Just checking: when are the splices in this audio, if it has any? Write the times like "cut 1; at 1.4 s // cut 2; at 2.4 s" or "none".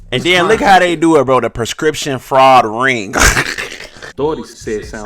cut 1; at 4.0 s